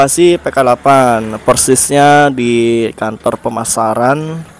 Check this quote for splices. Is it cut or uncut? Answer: uncut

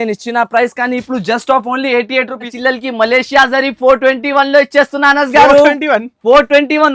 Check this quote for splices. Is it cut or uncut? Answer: cut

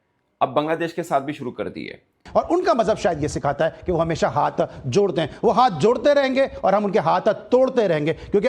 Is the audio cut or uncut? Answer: cut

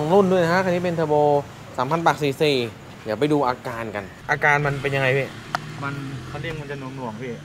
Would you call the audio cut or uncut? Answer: cut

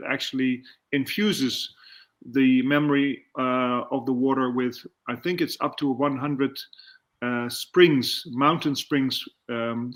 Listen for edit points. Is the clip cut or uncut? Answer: uncut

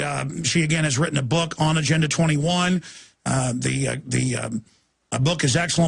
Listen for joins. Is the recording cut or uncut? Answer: cut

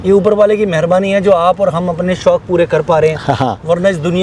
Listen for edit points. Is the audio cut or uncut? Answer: uncut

